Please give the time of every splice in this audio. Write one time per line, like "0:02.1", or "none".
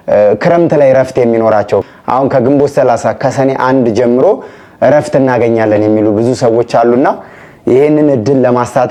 none